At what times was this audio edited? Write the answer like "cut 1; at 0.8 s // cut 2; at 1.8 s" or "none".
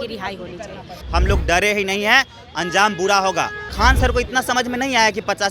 cut 1; at 1.0 s // cut 2; at 3.6 s